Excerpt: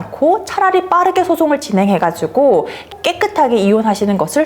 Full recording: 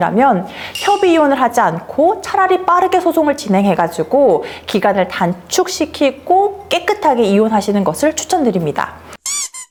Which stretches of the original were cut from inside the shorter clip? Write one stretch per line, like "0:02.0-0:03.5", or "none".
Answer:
0:04.7-0:06.6